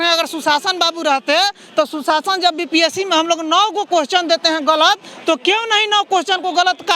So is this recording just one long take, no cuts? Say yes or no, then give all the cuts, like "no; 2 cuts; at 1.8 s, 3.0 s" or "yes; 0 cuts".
yes; 0 cuts